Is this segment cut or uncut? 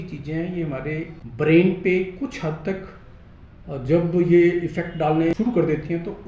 cut